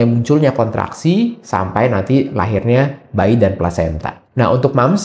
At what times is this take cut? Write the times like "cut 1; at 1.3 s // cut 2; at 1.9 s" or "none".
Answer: none